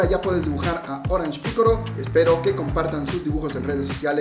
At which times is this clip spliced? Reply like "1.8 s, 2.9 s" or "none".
1.9 s